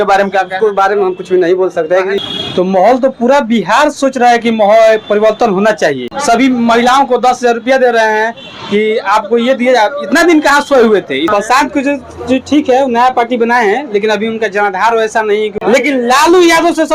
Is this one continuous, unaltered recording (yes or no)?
no